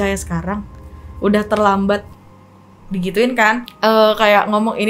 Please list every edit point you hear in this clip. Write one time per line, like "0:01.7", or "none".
0:03.7

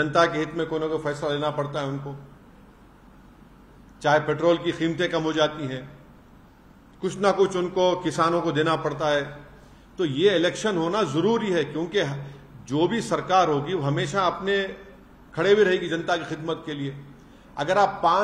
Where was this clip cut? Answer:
none

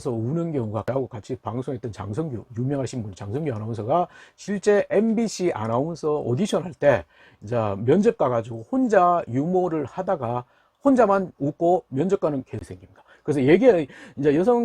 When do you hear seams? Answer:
0:00.8
0:12.7

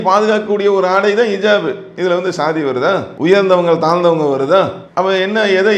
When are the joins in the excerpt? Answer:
0:03.1

